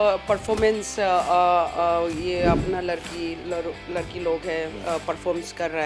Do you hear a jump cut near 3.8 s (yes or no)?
no